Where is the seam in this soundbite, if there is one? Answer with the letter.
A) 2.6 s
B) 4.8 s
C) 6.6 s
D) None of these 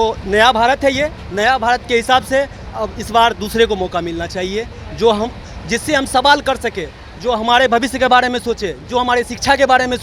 D